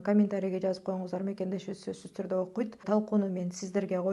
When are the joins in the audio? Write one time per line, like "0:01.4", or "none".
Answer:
0:02.8